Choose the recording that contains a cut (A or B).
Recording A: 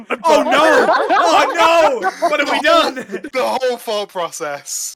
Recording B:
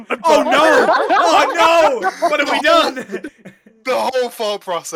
A